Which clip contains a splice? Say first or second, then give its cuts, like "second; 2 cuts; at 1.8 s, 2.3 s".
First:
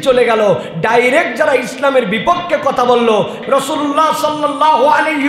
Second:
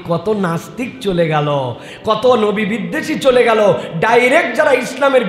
first; 1 cut; at 3.4 s